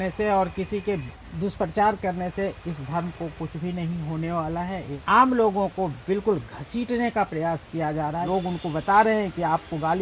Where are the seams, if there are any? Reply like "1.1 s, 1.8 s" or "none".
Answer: 5.0 s, 8.3 s